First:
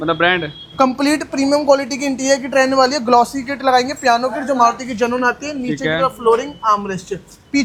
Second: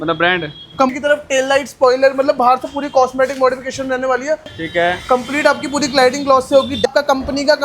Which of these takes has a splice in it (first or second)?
second